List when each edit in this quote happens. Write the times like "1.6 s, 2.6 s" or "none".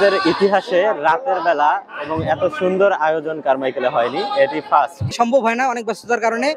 5.1 s